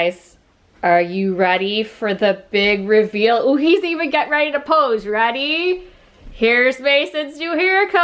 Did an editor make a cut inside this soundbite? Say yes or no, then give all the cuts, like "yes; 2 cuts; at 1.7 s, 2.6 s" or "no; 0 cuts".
no; 0 cuts